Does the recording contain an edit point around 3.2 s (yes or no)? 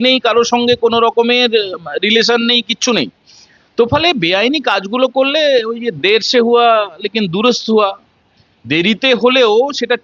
no